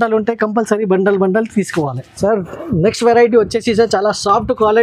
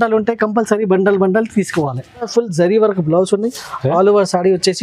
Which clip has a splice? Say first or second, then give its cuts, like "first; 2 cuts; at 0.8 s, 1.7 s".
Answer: second; 1 cut; at 2.2 s